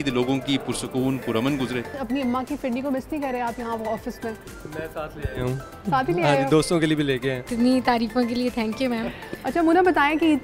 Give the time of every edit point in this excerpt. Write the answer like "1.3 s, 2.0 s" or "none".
2.0 s, 7.5 s